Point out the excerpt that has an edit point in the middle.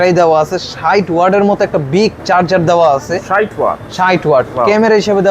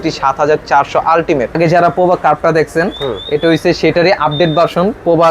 second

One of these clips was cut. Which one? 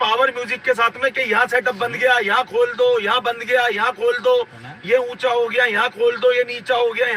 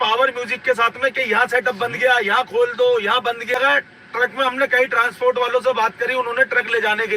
second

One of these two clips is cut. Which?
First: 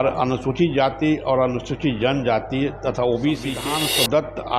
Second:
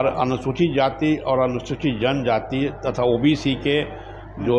first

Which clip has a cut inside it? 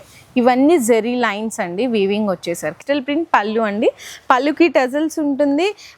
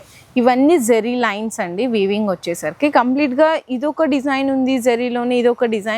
first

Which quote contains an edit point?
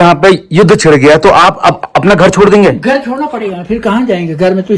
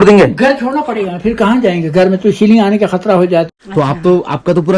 second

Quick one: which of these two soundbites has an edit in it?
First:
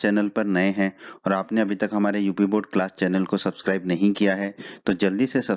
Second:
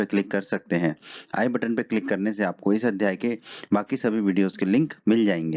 first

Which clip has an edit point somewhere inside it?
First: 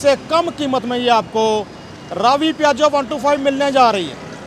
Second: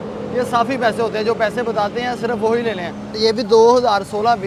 second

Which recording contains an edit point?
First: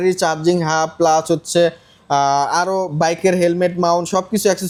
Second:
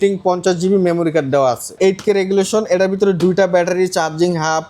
second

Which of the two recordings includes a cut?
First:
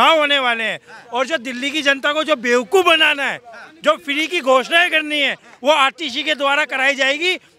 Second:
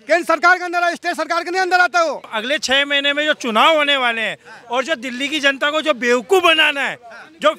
second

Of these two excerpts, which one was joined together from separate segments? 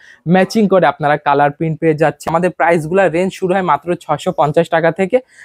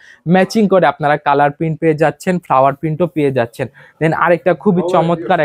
first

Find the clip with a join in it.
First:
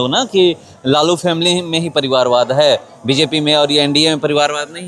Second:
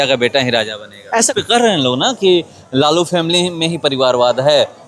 second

